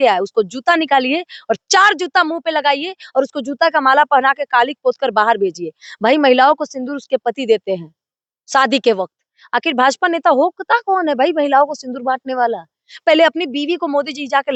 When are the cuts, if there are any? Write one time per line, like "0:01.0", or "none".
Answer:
none